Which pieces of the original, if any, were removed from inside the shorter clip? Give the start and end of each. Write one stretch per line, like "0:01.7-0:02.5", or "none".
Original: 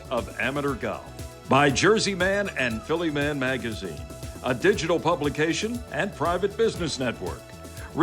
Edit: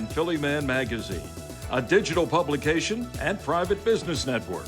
none